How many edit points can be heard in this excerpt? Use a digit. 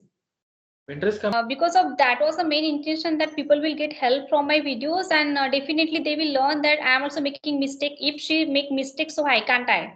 1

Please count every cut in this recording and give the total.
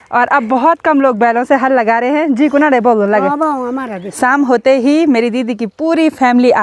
1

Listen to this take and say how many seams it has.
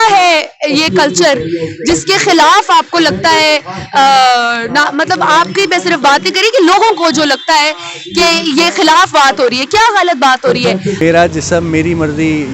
1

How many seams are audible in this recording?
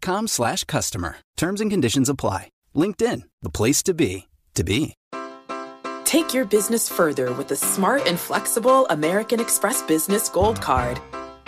1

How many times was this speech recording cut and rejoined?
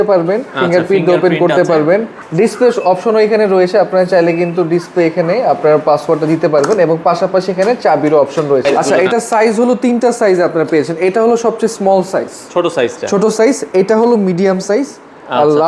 2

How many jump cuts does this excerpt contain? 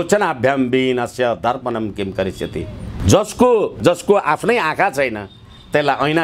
2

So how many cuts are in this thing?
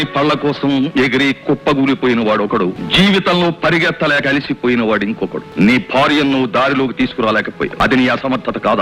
3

